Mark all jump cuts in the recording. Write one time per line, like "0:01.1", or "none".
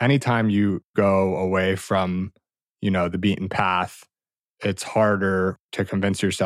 0:00.9
0:05.6